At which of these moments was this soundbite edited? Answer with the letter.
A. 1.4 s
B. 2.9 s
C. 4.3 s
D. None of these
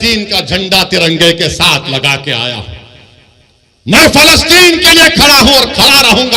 D